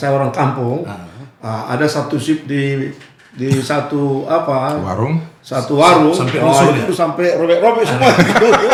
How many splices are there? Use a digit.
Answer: 0